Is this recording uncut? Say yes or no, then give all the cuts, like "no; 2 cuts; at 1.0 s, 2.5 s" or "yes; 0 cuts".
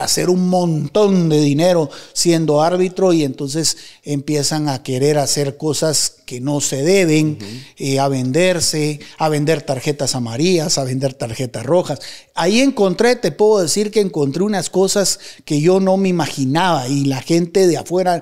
yes; 0 cuts